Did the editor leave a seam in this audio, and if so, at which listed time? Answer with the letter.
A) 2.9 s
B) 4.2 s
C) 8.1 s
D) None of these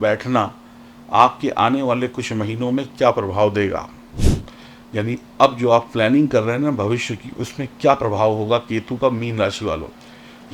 D